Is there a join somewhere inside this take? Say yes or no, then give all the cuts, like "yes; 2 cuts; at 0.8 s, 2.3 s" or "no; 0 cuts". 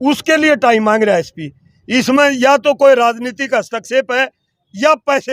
no; 0 cuts